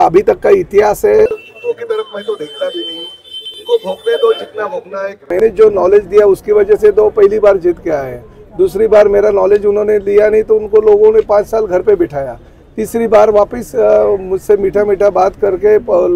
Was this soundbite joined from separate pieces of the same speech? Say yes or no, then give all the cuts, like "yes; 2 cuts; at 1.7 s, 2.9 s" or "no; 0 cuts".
yes; 2 cuts; at 1.2 s, 5.4 s